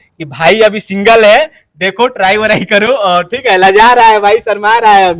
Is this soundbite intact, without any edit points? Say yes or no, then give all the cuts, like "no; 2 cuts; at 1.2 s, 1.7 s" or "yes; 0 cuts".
yes; 0 cuts